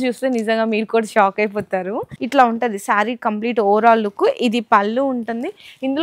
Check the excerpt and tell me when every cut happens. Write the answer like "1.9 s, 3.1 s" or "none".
2.1 s